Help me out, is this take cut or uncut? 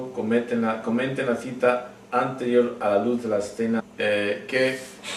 uncut